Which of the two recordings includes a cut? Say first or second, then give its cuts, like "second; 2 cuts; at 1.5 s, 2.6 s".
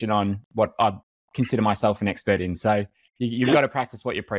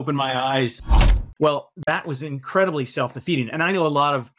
second; 1 cut; at 1.0 s